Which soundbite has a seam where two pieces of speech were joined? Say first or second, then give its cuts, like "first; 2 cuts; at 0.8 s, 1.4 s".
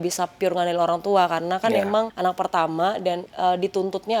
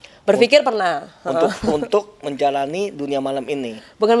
first; 2 cuts; at 2.1 s, 3.3 s